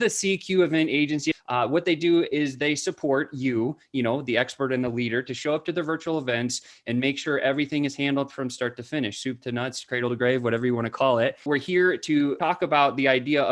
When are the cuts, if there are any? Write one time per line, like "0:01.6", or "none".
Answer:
0:01.4
0:11.4
0:12.4